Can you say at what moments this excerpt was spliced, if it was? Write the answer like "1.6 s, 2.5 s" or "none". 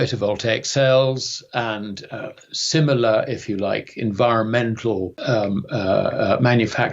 5.2 s